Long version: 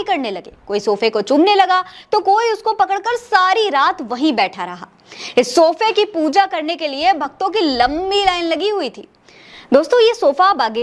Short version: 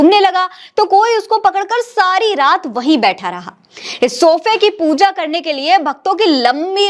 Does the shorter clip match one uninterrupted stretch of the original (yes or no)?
yes